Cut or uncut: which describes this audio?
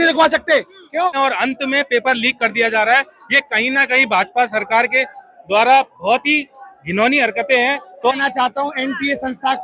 cut